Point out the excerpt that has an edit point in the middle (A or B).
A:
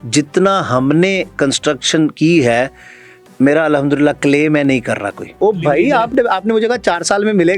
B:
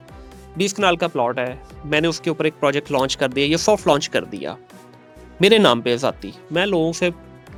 A